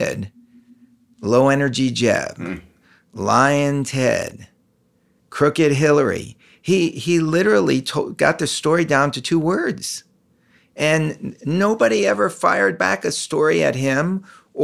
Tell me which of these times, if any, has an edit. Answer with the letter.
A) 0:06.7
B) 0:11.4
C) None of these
C